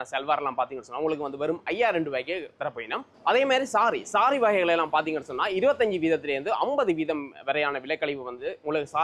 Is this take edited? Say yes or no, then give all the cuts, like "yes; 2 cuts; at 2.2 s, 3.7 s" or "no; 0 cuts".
no; 0 cuts